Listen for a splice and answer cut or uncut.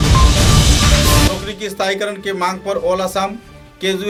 uncut